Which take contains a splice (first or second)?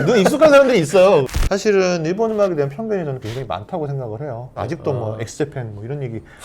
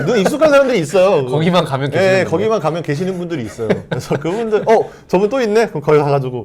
first